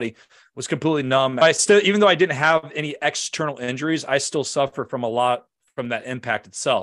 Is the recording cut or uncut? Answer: cut